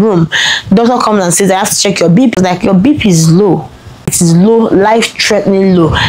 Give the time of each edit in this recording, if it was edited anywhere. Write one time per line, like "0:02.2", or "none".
0:02.3
0:04.1